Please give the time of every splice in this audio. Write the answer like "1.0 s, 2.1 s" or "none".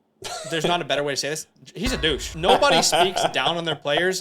2.3 s